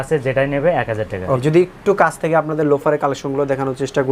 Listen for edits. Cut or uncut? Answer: cut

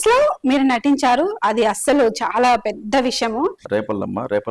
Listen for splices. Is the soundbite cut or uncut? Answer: cut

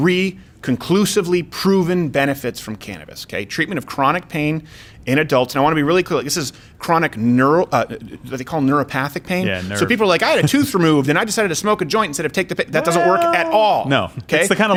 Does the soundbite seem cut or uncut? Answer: uncut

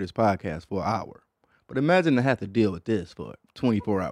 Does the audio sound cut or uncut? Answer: uncut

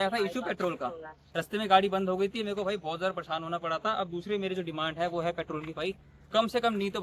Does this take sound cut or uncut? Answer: uncut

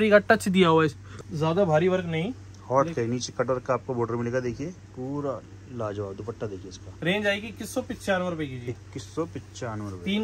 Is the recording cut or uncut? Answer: uncut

